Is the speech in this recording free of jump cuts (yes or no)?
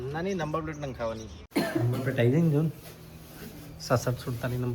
no